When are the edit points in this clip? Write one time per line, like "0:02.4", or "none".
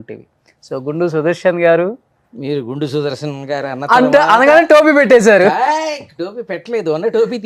none